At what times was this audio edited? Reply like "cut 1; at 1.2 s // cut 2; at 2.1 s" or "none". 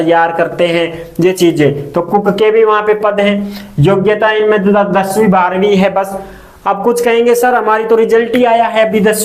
none